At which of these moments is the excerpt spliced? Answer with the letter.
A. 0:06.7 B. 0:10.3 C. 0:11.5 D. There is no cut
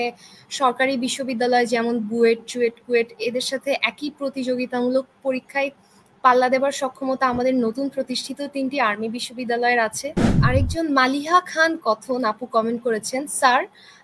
B